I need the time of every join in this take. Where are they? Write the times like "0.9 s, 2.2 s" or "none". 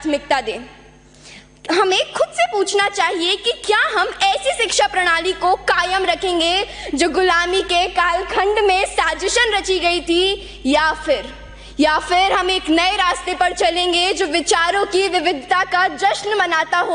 none